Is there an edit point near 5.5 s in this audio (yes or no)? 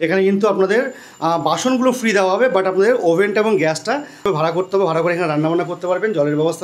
no